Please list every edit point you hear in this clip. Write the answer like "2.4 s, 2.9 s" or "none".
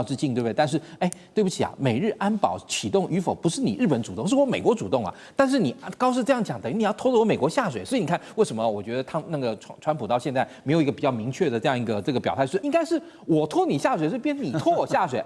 12.6 s

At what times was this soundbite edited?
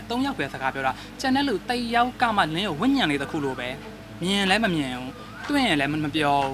none

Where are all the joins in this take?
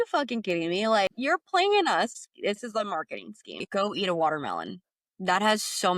1.2 s, 3.5 s

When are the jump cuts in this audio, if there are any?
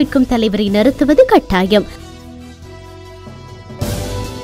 2.0 s, 3.5 s

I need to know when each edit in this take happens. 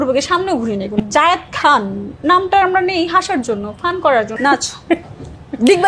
1.0 s, 4.3 s

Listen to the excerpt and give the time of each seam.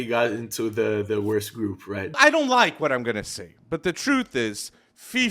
2.2 s

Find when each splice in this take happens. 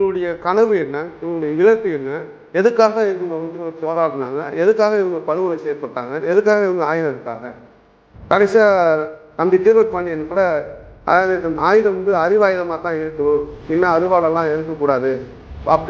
none

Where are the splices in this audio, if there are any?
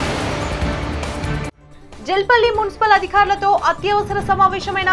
none

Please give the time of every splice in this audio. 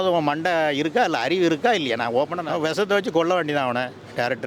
2.4 s

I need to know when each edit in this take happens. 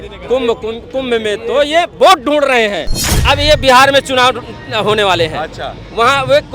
3.2 s

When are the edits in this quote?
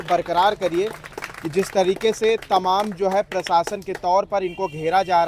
none

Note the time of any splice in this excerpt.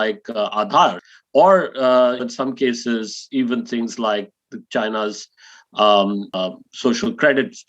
1.1 s, 2.2 s, 6.4 s

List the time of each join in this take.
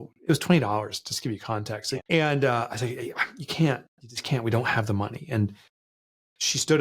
1.9 s

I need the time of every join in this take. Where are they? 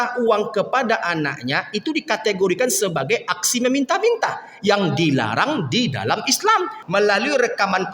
6.8 s

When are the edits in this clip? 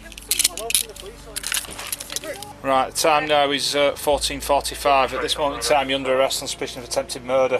2.5 s

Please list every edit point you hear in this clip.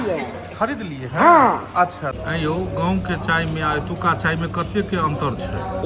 2.1 s

